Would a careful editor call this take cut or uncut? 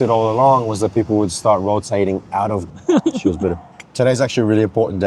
cut